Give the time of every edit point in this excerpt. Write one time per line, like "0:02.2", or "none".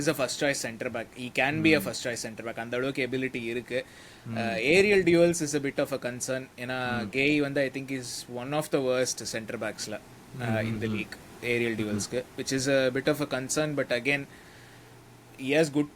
none